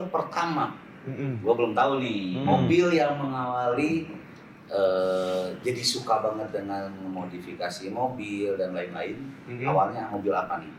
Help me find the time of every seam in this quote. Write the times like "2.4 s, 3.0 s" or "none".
none